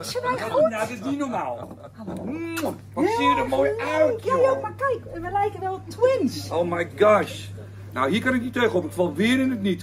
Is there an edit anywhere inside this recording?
no; 0 cuts

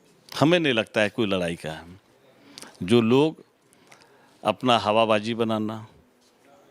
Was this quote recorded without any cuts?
yes; 0 cuts

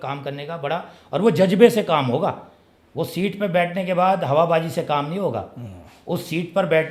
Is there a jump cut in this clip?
no; 0 cuts

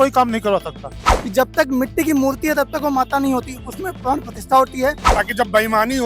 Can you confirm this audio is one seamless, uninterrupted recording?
no; 2 cuts; at 1.0 s, 5.1 s

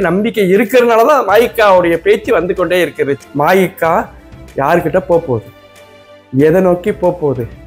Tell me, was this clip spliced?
yes; 1 cut; at 3.2 s

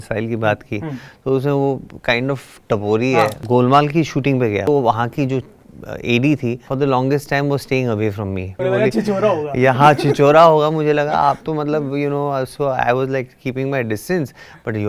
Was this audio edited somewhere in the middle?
yes; 4 cuts; at 3.4 s, 4.6 s, 6.7 s, 8.6 s

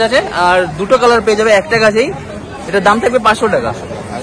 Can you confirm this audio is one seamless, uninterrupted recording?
yes; 0 cuts

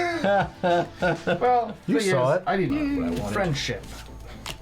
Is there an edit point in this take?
yes; 1 cut; at 2.7 s

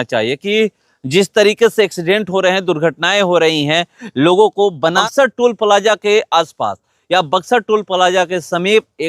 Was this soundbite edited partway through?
yes; 1 cut; at 5.0 s

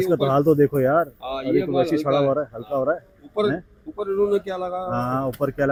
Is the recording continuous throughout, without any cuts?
yes; 0 cuts

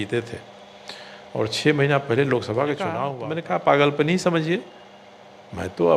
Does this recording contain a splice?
yes; 1 cut; at 3.1 s

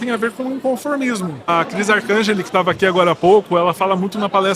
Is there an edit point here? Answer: yes; 1 cut; at 1.5 s

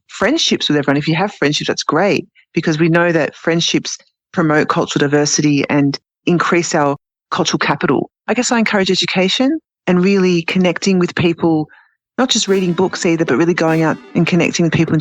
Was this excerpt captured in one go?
no; 2 cuts; at 8.2 s, 9.7 s

